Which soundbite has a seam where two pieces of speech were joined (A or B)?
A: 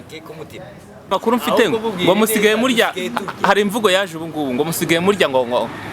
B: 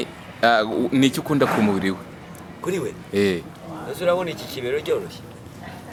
A